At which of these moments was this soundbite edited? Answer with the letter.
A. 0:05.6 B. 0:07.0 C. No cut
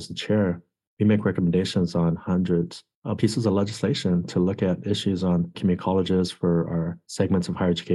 B